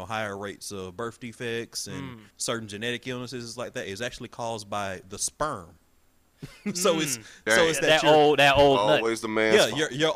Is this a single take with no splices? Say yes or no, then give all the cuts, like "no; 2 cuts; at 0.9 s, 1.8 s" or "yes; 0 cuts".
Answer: no; 1 cut; at 2.2 s